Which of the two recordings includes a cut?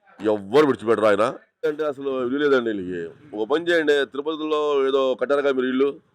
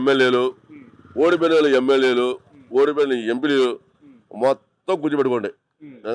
first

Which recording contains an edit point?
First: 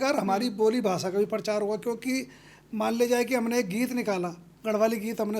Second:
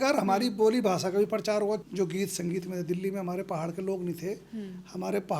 second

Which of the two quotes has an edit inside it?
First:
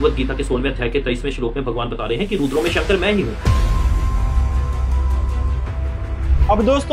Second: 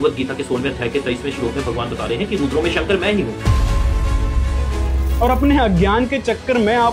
second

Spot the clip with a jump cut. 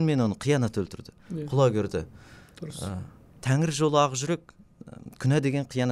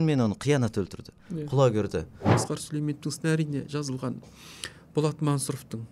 second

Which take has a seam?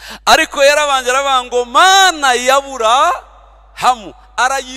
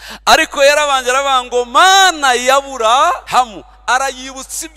second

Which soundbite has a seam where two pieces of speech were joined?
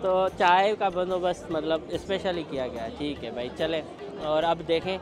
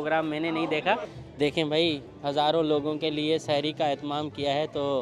second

